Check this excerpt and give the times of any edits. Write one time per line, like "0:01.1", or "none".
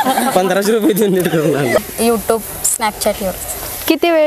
0:01.8